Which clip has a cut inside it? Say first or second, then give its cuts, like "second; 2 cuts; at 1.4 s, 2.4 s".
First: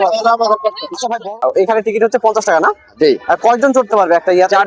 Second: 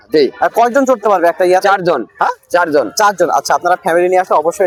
first; 1 cut; at 1.2 s